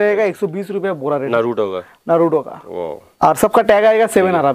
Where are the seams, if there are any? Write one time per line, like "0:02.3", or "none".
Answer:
0:01.3
0:03.0